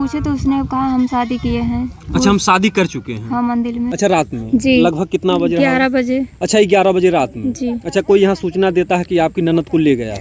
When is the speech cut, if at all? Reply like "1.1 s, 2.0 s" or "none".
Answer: 3.9 s